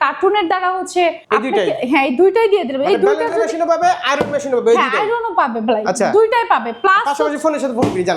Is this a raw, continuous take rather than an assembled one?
no; 1 cut; at 1.2 s

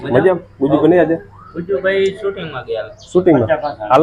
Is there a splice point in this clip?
no; 0 cuts

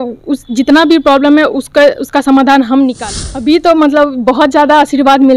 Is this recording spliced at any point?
yes; 1 cut; at 3.0 s

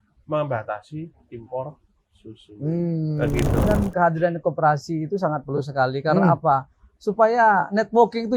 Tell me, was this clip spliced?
yes; 1 cut; at 3.6 s

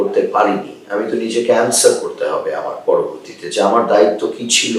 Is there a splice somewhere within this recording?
no; 0 cuts

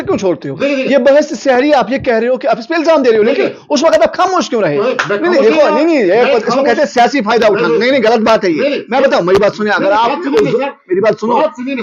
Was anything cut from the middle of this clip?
no; 0 cuts

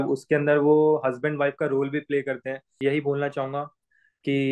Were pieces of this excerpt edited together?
yes; 1 cut; at 2.7 s

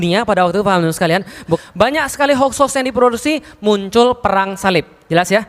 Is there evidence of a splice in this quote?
yes; 1 cut; at 1.6 s

